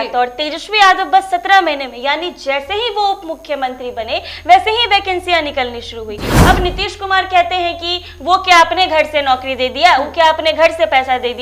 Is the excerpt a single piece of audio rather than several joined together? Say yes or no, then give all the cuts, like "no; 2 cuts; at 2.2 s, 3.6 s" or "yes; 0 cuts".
yes; 0 cuts